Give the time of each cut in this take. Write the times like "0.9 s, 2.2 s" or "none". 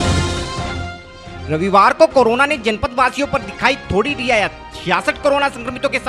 1.1 s